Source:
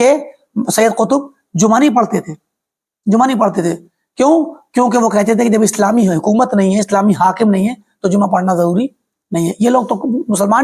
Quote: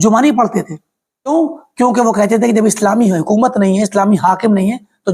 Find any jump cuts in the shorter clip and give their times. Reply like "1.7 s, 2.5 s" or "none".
1.3 s